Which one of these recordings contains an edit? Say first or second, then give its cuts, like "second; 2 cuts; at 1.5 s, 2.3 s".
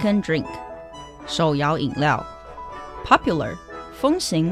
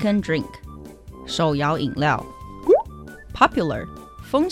first; 1 cut; at 2.6 s